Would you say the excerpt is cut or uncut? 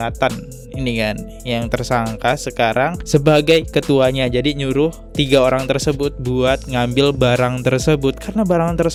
uncut